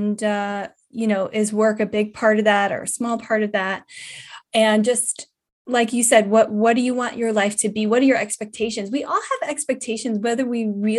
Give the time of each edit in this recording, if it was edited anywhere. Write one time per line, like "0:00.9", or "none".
0:04.4